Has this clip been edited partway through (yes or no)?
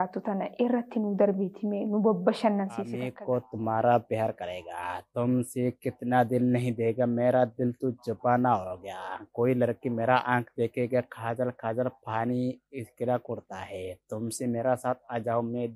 yes